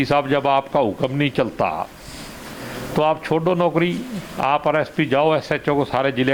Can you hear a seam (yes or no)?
no